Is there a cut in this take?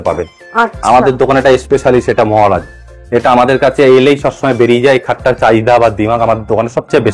no; 0 cuts

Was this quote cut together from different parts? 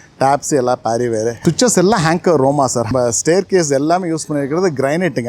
yes; 2 cuts; at 1.4 s, 2.9 s

